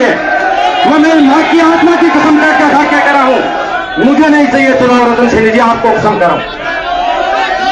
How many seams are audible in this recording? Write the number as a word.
zero